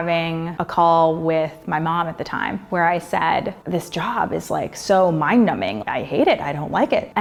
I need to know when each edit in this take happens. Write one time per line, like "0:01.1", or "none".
none